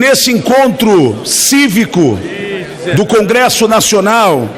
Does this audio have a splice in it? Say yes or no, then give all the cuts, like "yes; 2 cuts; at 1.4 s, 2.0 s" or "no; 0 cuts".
no; 0 cuts